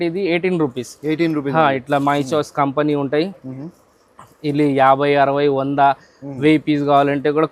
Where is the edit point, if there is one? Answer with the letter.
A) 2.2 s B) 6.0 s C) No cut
C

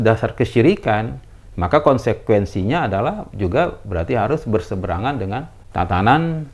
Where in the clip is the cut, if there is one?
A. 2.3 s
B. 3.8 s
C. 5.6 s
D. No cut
C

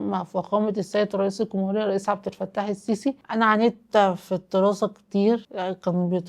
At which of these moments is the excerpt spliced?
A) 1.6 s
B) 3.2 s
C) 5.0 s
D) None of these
B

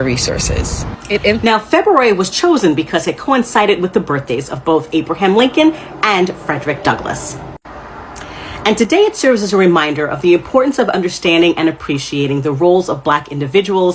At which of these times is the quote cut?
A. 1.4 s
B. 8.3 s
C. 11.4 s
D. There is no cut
A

